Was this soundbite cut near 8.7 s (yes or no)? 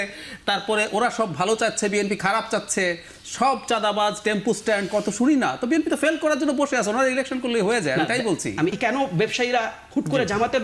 yes